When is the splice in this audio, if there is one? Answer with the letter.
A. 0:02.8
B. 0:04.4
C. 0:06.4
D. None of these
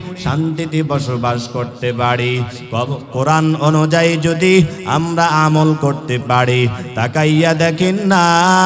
D